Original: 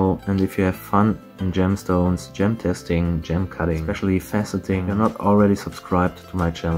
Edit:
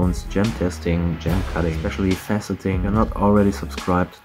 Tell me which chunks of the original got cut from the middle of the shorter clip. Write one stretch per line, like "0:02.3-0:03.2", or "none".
none